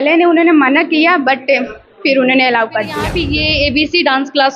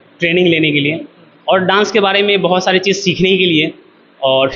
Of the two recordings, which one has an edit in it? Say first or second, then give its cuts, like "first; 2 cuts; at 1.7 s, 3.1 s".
first; 1 cut; at 3.2 s